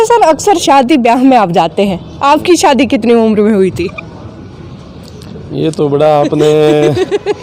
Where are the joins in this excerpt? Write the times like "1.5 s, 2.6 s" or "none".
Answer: none